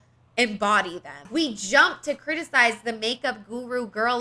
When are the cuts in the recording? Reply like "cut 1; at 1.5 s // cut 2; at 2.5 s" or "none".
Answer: cut 1; at 1.2 s